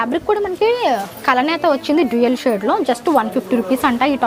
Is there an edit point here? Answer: no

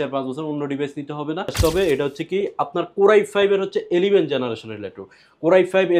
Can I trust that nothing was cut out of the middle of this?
no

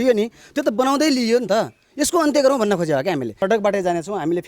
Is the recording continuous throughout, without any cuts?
no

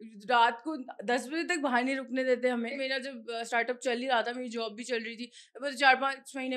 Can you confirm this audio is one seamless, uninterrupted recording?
no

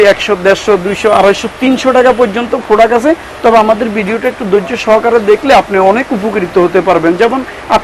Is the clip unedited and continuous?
yes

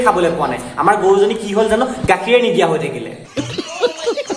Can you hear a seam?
yes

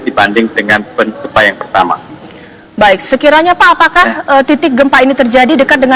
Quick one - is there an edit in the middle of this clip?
no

